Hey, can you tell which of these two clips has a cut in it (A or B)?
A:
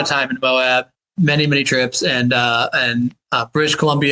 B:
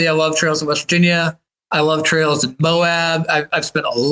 A